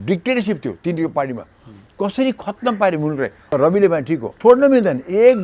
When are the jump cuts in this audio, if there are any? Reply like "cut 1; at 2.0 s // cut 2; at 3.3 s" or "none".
cut 1; at 3.4 s // cut 2; at 4.3 s

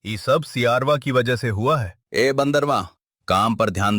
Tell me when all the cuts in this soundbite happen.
cut 1; at 2.0 s

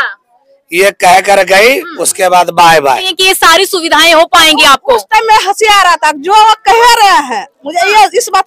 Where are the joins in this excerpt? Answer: cut 1; at 3.1 s

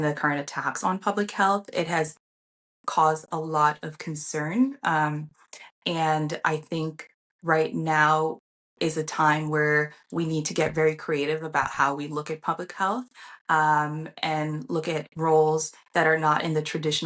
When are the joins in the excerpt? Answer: none

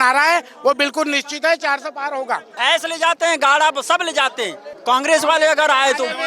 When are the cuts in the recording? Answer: cut 1; at 2.5 s // cut 2; at 4.7 s

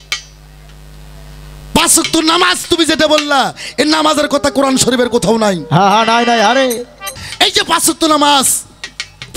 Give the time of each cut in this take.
cut 1; at 7.1 s

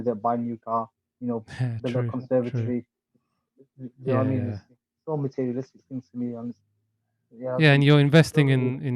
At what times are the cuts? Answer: none

